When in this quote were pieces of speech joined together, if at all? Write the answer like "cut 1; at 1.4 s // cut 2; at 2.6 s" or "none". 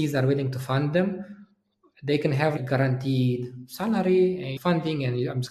cut 1; at 2.5 s // cut 2; at 4.5 s